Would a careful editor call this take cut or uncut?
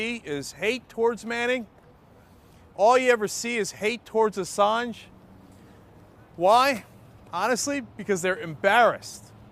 cut